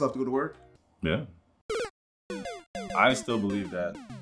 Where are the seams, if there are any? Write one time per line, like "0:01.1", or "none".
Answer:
0:02.9